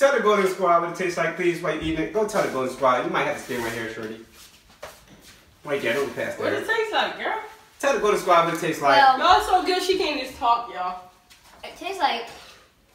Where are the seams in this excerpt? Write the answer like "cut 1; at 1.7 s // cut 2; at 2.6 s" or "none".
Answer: none